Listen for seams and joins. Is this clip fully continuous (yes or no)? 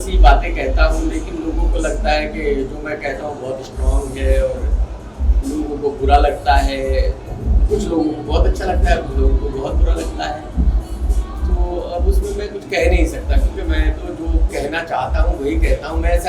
yes